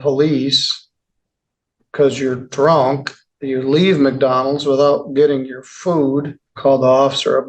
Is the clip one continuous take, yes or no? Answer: no